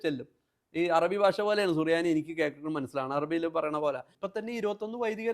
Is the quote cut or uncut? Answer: cut